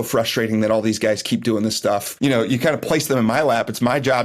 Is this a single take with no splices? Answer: no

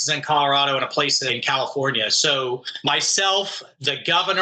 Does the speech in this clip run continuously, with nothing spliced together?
no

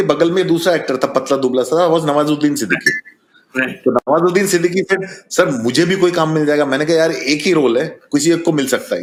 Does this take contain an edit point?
no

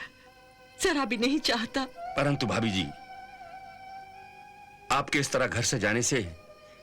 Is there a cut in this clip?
yes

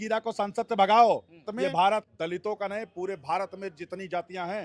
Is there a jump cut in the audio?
yes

